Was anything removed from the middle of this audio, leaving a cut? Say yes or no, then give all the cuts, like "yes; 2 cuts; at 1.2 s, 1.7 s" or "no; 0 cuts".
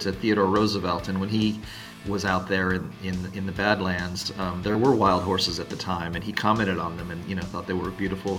no; 0 cuts